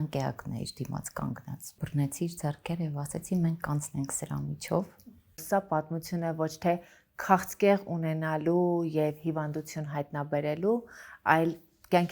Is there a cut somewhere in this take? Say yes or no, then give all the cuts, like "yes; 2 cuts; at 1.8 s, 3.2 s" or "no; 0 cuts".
yes; 2 cuts; at 1.8 s, 5.4 s